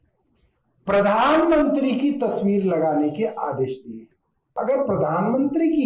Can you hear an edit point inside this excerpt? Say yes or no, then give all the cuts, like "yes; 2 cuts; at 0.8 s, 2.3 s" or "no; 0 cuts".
yes; 1 cut; at 4.5 s